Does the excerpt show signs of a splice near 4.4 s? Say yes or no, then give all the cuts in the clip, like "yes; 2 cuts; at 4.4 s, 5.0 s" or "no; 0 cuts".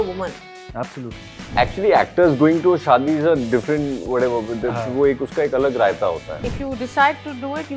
no; 2 cuts; at 1.5 s, 6.3 s